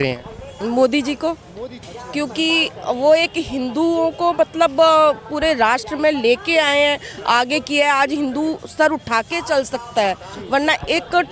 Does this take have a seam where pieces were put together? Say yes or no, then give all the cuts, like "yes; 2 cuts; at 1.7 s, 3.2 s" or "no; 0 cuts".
yes; 1 cut; at 1.9 s